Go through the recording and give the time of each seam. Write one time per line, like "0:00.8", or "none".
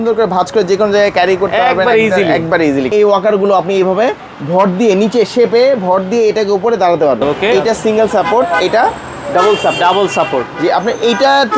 0:02.9
0:07.4